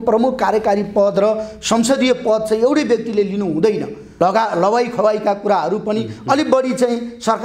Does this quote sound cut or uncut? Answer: cut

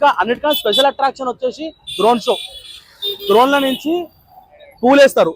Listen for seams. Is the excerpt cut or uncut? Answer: uncut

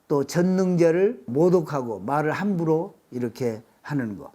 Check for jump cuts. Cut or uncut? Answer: cut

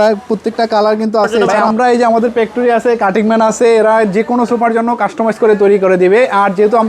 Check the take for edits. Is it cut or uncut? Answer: cut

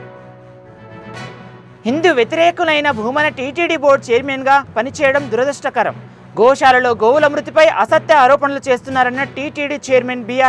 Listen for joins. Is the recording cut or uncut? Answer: cut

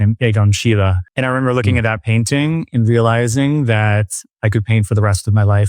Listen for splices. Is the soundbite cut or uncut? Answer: cut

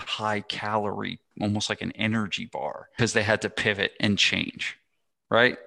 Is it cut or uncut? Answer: cut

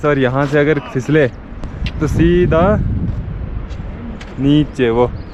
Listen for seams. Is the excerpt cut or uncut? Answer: uncut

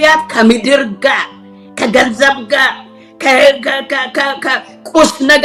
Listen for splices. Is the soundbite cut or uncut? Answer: uncut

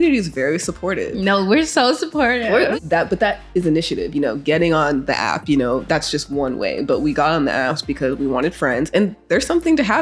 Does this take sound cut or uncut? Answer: cut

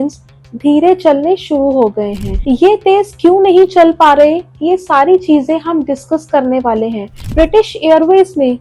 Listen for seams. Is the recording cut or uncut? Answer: cut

